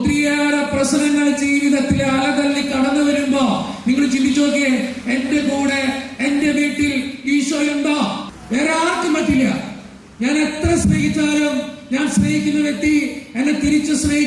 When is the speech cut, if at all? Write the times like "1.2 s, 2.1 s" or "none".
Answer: 8.3 s